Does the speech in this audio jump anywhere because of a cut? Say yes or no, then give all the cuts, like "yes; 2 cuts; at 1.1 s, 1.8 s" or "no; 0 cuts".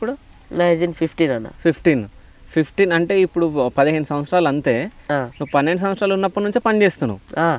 no; 0 cuts